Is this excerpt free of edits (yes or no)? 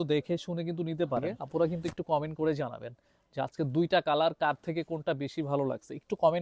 no